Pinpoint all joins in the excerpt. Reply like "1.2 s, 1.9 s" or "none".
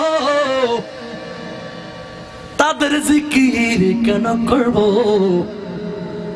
none